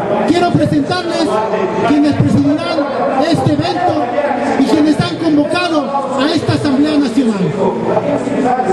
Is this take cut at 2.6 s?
yes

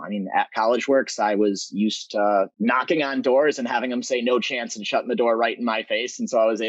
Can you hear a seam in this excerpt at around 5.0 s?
no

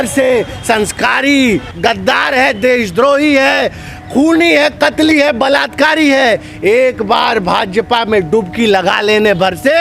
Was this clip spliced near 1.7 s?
yes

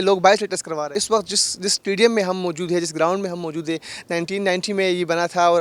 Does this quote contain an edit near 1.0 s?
yes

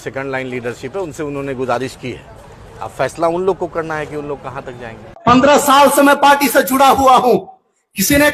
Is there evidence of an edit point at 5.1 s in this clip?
yes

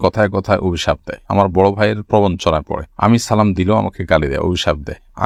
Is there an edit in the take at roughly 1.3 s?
no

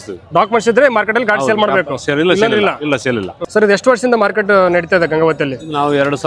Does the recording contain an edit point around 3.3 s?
yes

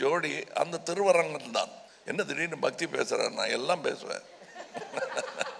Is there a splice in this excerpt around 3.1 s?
no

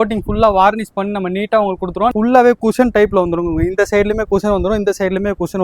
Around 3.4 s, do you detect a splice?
no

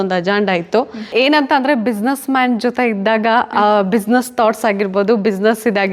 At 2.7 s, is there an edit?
no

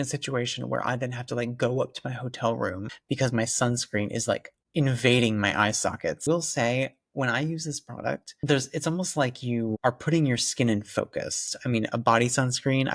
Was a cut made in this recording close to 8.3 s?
yes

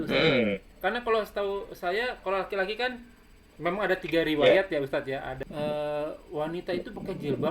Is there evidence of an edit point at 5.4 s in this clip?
yes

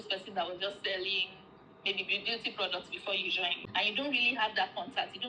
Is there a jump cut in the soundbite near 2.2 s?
no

